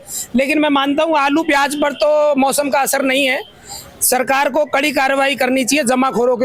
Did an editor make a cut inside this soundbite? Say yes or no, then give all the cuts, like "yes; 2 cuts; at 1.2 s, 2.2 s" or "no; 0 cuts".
no; 0 cuts